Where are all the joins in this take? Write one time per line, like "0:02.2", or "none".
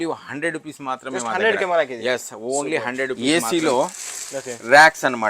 0:03.2